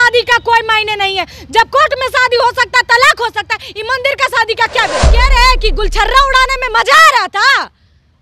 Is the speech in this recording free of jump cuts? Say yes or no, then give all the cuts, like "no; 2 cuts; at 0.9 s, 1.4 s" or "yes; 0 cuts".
no; 1 cut; at 5.1 s